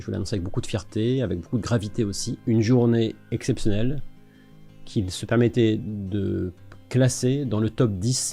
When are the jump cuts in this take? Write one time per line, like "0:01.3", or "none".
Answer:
0:02.3